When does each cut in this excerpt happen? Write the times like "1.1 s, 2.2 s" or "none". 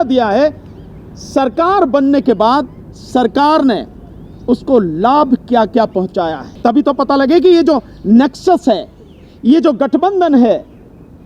6.4 s